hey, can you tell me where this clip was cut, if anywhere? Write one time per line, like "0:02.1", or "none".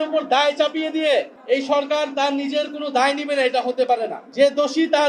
0:04.2